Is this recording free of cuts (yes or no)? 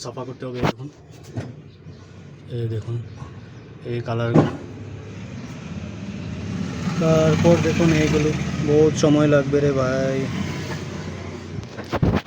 yes